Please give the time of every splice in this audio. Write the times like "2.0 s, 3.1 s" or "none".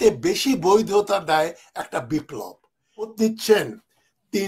3.1 s